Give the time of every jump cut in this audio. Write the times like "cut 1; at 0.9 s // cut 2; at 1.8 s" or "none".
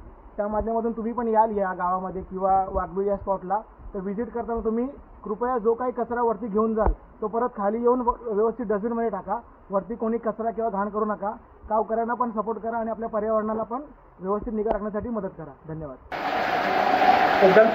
cut 1; at 16.1 s